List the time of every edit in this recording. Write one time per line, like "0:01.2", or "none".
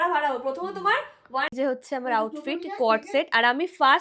0:01.5